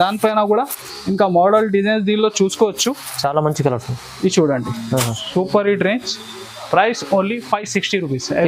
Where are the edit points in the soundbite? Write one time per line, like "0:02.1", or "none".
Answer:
none